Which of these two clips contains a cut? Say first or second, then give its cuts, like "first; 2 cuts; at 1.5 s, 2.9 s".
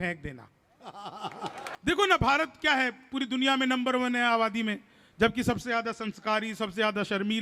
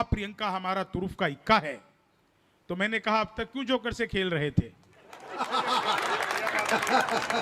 first; 1 cut; at 1.6 s